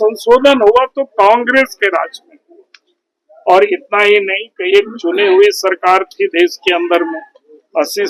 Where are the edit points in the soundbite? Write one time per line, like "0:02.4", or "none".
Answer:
none